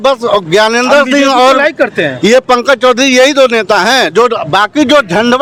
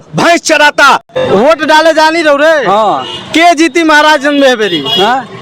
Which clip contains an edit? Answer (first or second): second